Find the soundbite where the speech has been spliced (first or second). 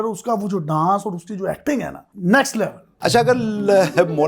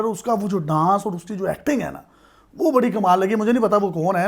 first